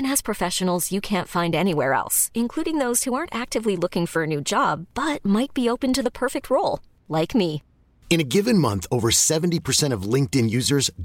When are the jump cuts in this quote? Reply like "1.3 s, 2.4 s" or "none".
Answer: none